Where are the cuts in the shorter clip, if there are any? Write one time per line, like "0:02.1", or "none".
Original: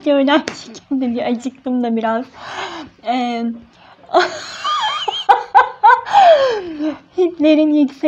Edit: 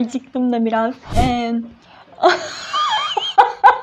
0:01.0